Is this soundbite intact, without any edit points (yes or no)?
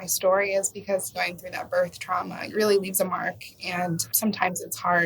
no